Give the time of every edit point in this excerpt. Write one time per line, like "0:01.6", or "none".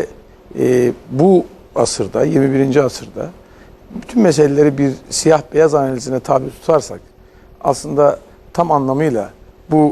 0:07.0

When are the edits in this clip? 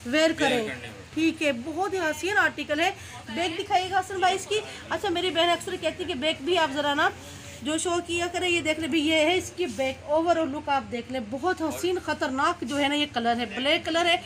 none

